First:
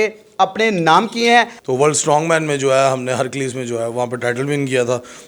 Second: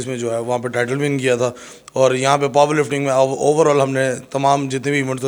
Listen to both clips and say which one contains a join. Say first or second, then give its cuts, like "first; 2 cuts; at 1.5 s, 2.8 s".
first; 1 cut; at 1.6 s